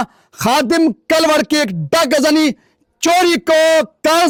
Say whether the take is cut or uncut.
uncut